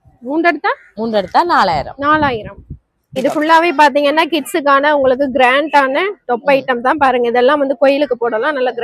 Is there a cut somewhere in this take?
yes; 1 cut; at 3.2 s

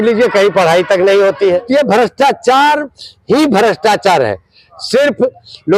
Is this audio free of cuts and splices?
no; 1 cut; at 1.6 s

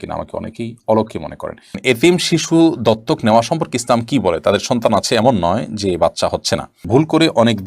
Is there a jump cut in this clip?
yes; 2 cuts; at 1.8 s, 6.8 s

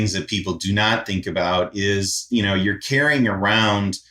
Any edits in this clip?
no; 0 cuts

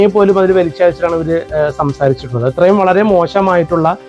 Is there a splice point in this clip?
no; 0 cuts

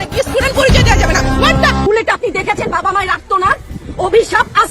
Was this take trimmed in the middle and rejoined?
yes; 1 cut; at 1.9 s

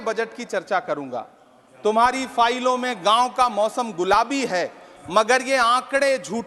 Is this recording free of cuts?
yes; 0 cuts

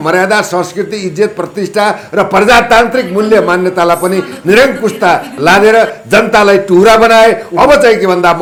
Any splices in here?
no; 0 cuts

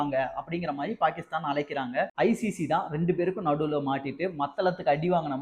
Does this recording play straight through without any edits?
no; 1 cut; at 2.1 s

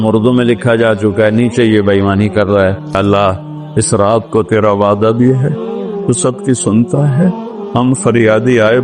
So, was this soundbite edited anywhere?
yes; 1 cut; at 3.0 s

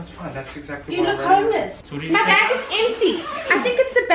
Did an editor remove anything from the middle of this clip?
yes; 1 cut; at 1.9 s

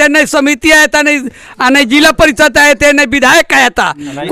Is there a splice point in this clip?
no; 0 cuts

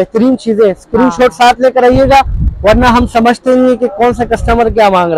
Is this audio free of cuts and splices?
yes; 0 cuts

